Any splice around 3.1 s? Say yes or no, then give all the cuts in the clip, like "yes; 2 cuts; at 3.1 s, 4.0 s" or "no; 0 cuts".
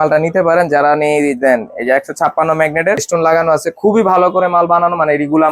yes; 1 cut; at 3.1 s